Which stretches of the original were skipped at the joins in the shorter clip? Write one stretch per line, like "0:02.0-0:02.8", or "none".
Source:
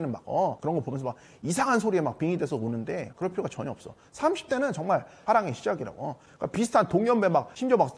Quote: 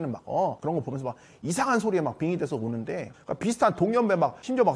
0:03.1-0:06.2

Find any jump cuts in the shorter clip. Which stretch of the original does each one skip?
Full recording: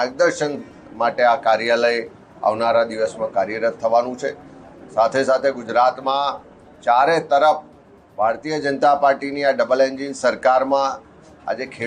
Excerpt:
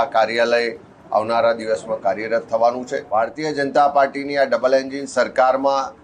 0:04.2-0:08.0

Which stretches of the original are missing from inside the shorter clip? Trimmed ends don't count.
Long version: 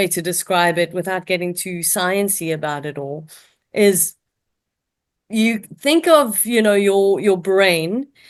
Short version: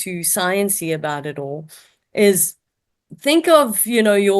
0:04.7-0:05.7

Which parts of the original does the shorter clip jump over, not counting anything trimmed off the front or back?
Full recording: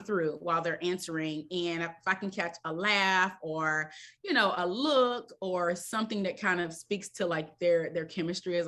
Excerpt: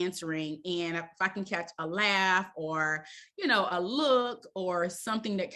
none

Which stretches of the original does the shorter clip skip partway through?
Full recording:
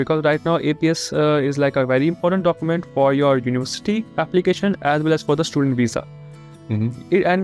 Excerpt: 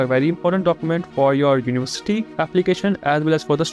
none

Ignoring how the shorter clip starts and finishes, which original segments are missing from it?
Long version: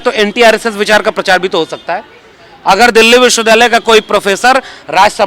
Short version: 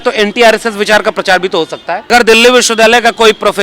0:02.1-0:02.8

